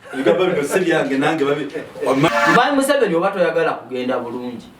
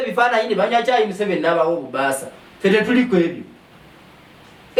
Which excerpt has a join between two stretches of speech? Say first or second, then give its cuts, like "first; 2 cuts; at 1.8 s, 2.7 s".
first; 1 cut; at 2.3 s